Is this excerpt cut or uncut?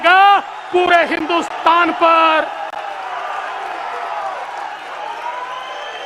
uncut